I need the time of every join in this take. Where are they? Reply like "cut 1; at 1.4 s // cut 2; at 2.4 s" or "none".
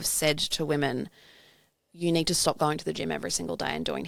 none